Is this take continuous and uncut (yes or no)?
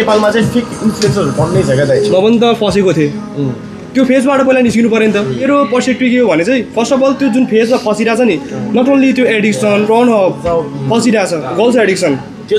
no